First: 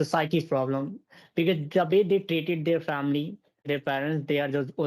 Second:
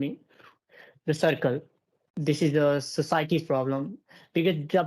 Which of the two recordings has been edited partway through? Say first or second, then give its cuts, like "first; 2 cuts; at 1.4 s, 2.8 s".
first; 1 cut; at 3.6 s